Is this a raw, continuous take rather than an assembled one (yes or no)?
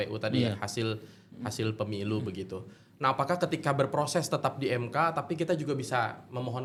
yes